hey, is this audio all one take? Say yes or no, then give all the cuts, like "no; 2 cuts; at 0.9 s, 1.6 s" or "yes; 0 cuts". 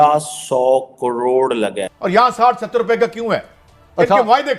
no; 1 cut; at 1.9 s